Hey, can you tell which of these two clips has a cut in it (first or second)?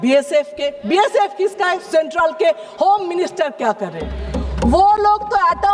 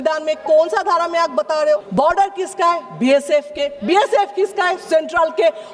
second